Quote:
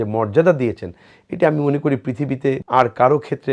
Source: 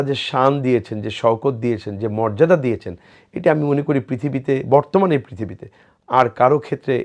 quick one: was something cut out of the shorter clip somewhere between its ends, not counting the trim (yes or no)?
yes